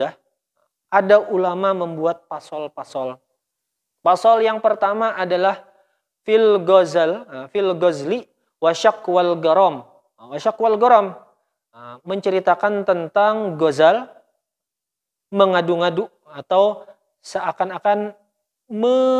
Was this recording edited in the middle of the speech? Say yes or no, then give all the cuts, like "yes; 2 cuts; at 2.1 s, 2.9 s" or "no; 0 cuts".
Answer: no; 0 cuts